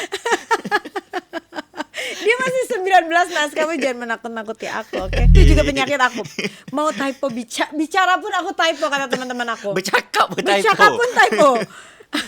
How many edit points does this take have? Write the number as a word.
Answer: one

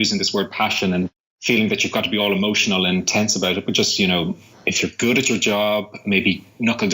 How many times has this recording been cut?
one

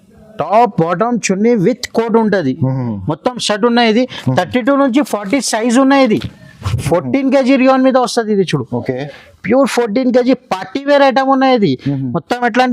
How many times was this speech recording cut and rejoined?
one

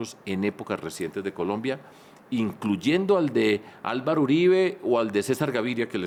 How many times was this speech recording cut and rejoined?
zero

